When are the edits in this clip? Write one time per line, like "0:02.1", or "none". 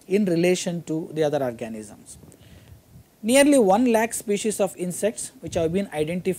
none